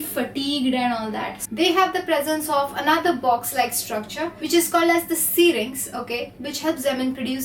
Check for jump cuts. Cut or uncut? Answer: cut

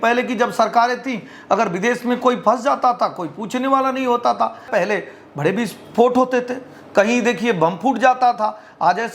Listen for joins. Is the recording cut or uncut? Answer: cut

